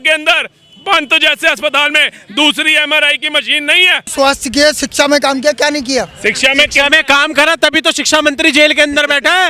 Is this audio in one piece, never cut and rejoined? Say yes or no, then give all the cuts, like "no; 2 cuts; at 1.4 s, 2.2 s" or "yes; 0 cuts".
no; 1 cut; at 4.1 s